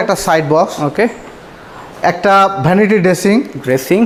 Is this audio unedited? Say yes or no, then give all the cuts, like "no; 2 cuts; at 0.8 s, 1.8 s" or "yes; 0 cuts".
yes; 0 cuts